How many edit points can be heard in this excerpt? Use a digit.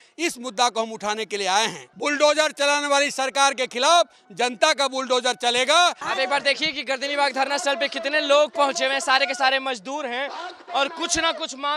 2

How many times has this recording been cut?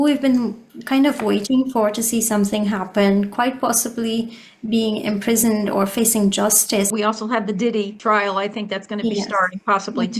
2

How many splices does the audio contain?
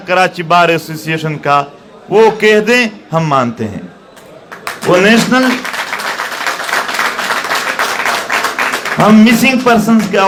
0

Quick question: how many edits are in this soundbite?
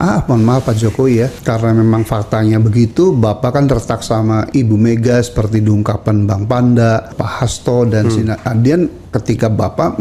4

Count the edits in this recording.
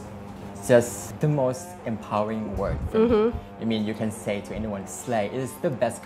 1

